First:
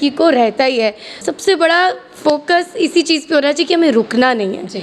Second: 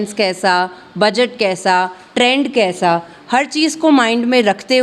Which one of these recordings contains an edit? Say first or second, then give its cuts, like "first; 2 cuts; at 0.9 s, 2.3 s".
first; 1 cut; at 1.2 s